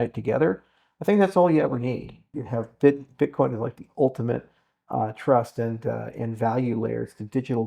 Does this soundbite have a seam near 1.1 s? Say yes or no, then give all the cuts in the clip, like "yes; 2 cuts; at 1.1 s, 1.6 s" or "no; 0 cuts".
no; 1 cut; at 2.4 s